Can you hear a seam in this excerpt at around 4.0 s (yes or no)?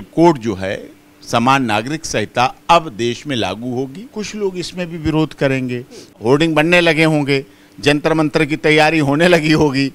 yes